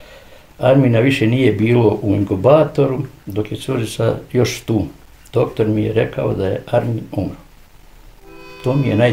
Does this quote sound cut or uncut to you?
uncut